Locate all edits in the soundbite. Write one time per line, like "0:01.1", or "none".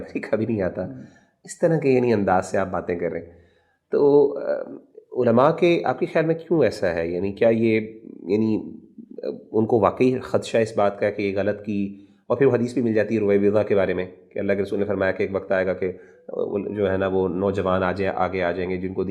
none

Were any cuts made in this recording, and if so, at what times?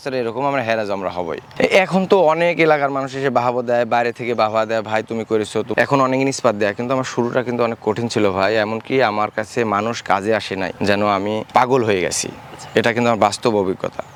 none

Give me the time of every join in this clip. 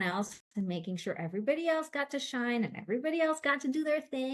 none

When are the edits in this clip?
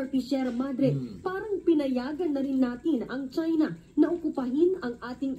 0:04.1

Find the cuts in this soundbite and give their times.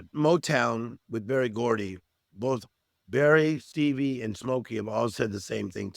0:03.7

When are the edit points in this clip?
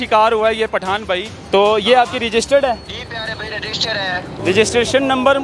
0:01.3
0:02.9
0:04.4

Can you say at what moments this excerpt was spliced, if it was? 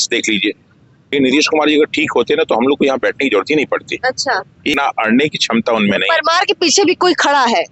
0:01.0
0:04.7

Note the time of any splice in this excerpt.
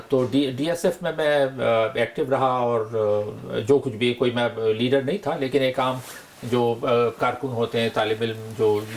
none

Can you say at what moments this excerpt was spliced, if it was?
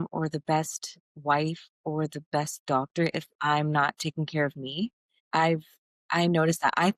0:05.1

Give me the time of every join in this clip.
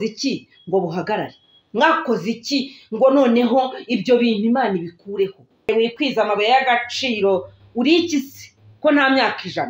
0:05.7

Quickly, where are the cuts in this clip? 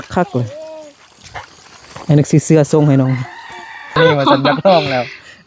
0:04.0

